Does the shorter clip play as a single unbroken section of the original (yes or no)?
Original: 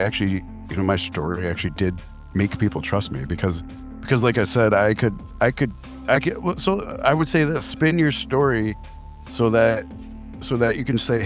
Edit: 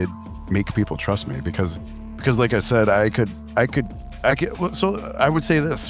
yes